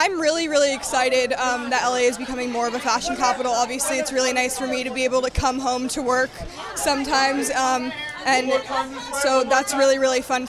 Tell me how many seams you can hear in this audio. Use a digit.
1